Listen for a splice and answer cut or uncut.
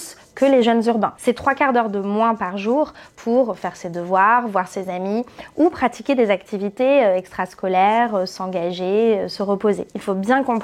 uncut